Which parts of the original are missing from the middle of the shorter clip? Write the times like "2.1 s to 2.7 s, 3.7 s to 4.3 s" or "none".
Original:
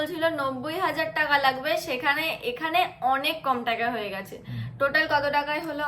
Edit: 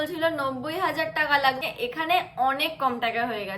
1.6 s to 2.2 s